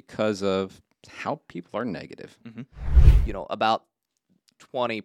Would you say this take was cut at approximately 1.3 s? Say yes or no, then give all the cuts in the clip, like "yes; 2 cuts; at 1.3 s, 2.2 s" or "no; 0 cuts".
no; 1 cut; at 2.9 s